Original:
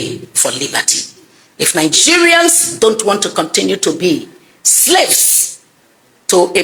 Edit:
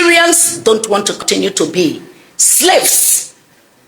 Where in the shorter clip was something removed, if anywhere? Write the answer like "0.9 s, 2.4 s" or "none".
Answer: 1.2 s

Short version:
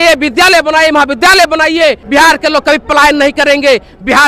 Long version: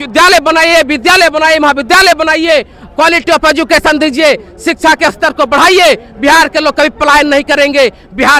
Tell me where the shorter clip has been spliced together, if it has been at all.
2.0 s

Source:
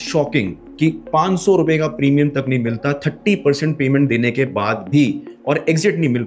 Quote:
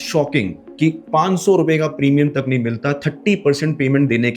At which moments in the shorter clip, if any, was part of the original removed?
none

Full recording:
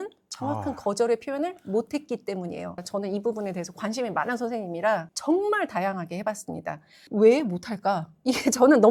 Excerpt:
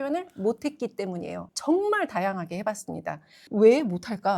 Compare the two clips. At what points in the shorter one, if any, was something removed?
1.5 s

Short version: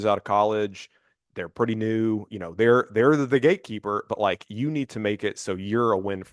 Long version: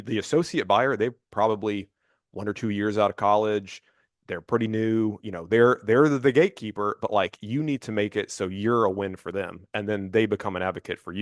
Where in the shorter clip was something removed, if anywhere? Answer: none

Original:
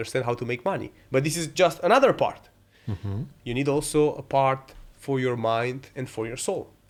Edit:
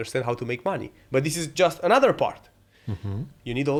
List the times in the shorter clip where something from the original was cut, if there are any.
none

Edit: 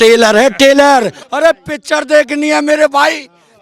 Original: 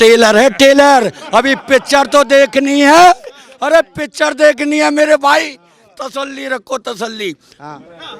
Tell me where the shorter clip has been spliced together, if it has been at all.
1.2 s

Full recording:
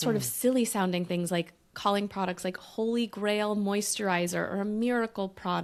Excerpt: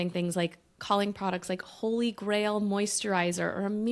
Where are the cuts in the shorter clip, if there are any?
none

